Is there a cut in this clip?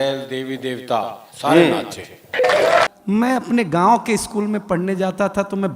yes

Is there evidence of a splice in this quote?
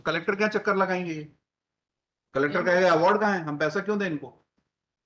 no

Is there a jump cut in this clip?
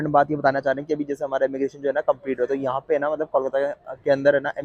no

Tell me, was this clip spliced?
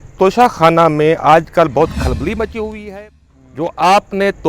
yes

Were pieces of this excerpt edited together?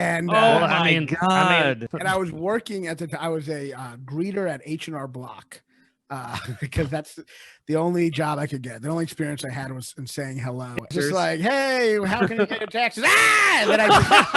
yes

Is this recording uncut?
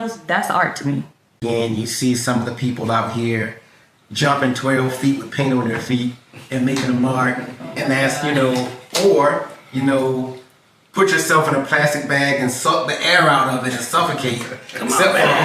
no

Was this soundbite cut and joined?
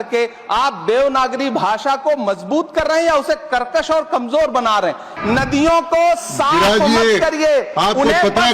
yes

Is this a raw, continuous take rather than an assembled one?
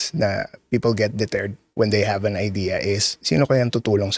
no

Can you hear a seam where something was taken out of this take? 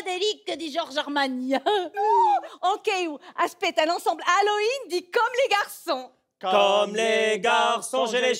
yes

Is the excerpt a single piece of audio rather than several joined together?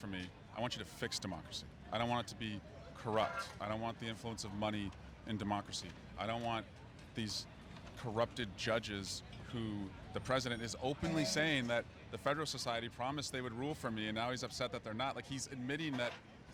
yes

